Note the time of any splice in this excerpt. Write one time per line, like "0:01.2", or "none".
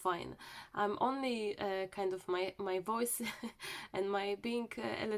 none